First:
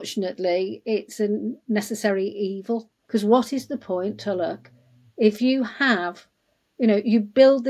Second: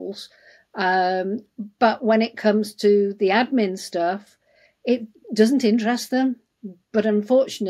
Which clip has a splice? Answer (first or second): first